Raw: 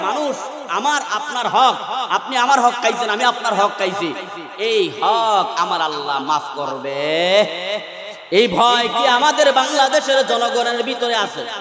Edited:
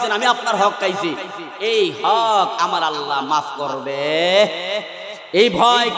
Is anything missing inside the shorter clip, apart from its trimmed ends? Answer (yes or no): no